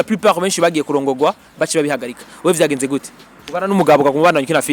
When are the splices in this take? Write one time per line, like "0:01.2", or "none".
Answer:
none